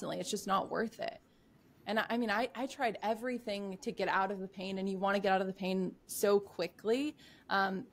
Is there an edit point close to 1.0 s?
no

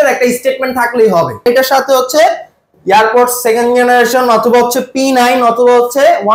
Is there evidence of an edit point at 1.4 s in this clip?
yes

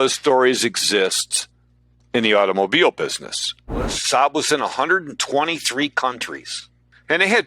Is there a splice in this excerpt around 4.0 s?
yes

